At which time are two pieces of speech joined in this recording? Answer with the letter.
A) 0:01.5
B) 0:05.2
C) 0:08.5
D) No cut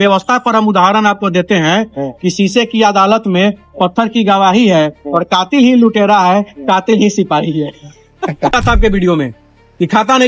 C